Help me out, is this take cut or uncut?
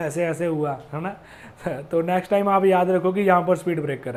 uncut